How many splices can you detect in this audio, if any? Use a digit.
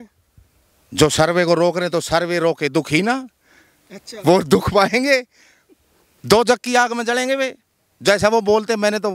0